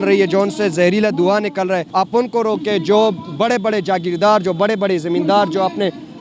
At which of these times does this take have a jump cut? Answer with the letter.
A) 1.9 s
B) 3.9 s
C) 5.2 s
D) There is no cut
A